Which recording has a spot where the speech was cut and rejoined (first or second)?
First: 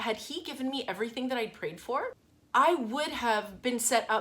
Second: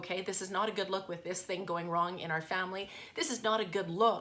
first